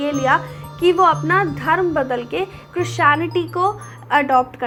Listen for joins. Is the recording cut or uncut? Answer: uncut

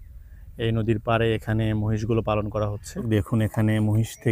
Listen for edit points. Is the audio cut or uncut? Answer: cut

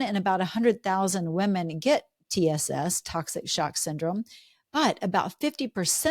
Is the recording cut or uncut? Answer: uncut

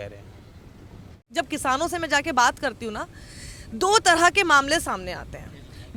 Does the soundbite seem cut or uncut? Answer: uncut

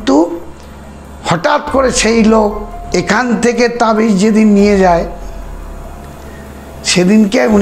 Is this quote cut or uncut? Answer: cut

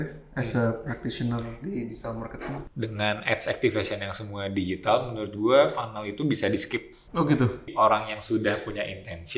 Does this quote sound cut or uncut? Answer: cut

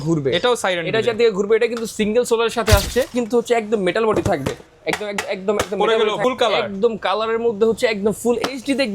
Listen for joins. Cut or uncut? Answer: cut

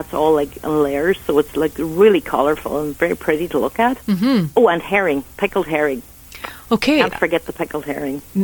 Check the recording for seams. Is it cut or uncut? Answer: uncut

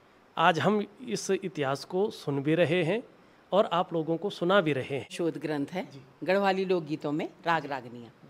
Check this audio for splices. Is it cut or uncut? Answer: cut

